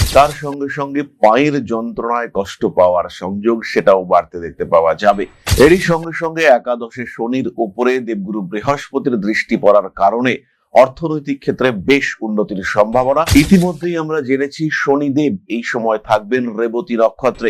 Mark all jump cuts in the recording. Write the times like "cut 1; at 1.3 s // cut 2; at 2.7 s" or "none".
cut 1; at 5.5 s